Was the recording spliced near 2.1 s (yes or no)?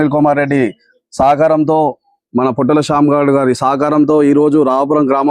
no